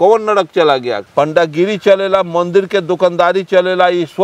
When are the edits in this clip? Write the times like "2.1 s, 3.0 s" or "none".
1.0 s